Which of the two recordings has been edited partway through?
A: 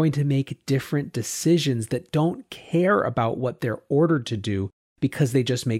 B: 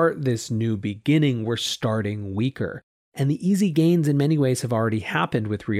B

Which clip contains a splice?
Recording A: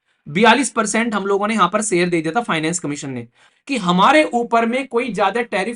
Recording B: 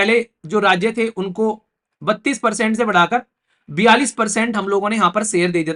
A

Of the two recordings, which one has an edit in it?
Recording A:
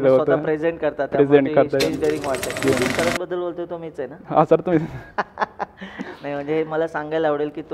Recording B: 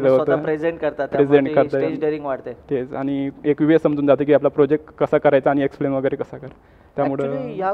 A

